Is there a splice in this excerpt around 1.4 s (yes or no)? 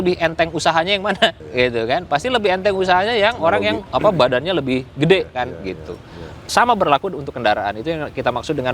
yes